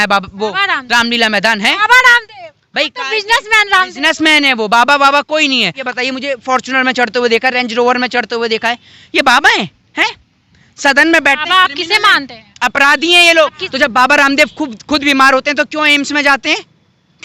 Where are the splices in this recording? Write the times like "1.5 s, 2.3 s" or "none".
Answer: 5.8 s, 13.6 s